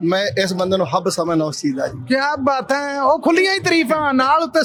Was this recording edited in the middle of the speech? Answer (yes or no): no